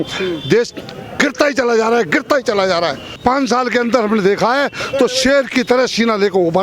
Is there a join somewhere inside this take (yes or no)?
yes